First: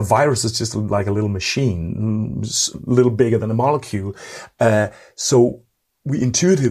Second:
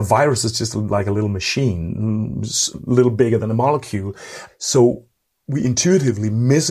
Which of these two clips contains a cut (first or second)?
second